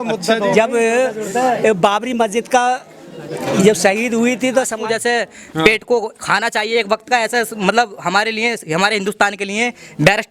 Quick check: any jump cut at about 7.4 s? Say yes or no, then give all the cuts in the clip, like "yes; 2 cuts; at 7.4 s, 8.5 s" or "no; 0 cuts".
no; 1 cut; at 4.8 s